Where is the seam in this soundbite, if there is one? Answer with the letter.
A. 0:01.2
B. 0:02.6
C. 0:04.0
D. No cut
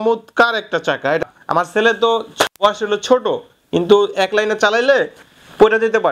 A